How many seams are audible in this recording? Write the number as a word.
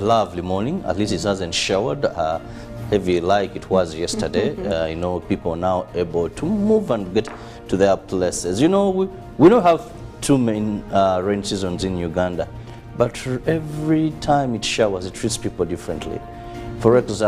one